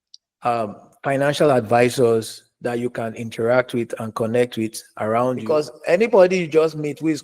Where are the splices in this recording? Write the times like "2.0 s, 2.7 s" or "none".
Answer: 5.4 s

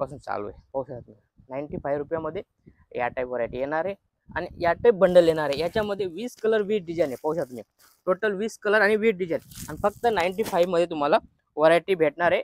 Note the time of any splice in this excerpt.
none

